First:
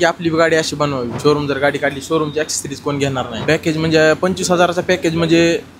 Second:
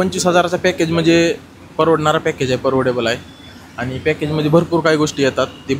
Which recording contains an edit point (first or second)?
first